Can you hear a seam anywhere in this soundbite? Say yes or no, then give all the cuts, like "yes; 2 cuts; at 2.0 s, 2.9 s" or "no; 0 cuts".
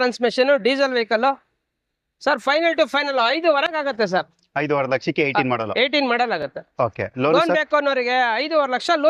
no; 0 cuts